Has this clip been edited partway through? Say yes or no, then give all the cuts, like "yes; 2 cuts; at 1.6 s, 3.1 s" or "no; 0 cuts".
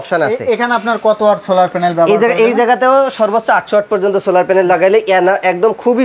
no; 0 cuts